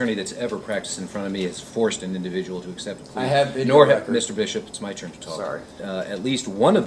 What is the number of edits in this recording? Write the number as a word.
one